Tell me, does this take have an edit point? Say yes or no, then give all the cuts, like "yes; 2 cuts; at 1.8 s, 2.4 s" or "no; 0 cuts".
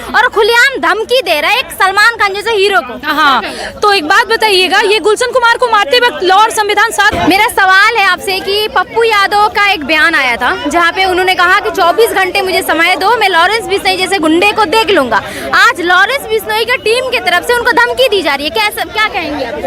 yes; 1 cut; at 7.1 s